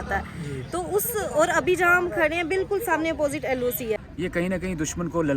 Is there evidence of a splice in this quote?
yes; 1 cut; at 4.1 s

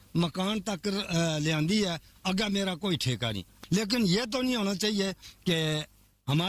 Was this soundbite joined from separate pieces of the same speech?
yes; 1 cut; at 3.5 s

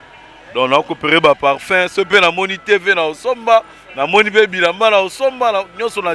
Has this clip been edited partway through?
no; 0 cuts

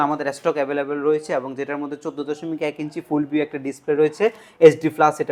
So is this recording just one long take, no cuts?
yes; 0 cuts

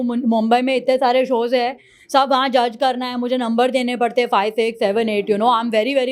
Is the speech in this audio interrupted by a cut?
no; 0 cuts

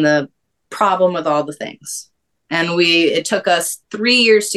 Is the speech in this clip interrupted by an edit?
no; 0 cuts

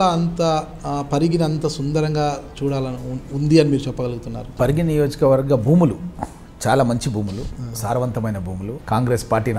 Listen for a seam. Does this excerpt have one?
yes; 2 cuts; at 4.5 s, 8.7 s

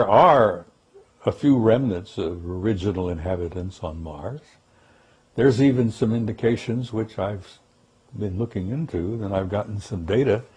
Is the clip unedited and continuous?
yes; 0 cuts

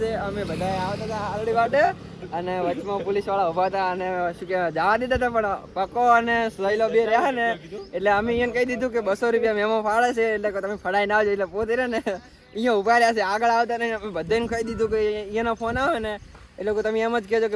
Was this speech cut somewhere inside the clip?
no; 0 cuts

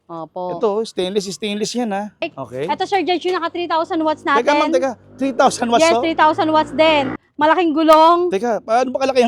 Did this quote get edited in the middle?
yes; 2 cuts; at 2.3 s, 7.2 s

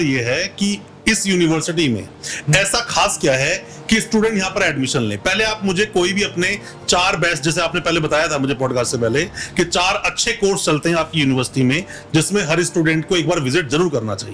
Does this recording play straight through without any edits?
yes; 0 cuts

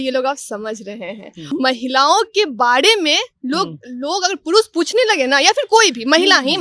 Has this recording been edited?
yes; 1 cut; at 1.4 s

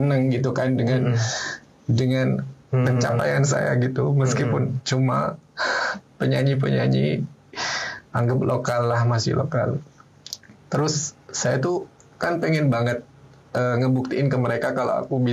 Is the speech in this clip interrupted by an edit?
no; 0 cuts

